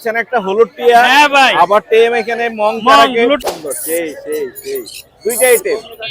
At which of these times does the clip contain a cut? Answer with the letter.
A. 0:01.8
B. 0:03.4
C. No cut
B